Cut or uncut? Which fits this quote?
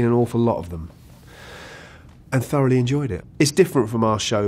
cut